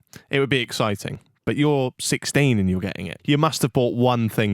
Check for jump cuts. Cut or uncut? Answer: cut